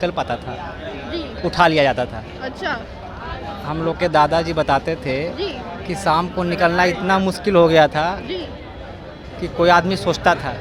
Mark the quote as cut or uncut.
uncut